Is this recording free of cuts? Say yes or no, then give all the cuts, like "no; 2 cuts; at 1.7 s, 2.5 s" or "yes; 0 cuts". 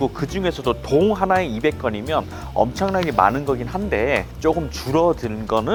yes; 0 cuts